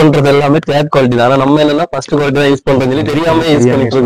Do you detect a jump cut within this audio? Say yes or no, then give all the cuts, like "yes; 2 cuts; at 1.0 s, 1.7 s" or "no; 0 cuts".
no; 0 cuts